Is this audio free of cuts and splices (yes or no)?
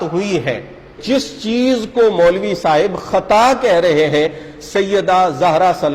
no